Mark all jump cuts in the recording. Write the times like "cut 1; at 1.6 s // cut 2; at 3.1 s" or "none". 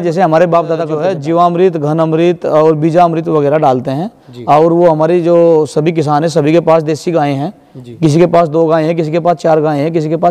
cut 1; at 1.1 s